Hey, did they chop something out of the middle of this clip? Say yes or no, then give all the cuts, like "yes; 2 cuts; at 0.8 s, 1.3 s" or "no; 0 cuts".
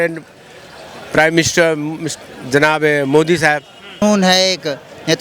yes; 1 cut; at 4.0 s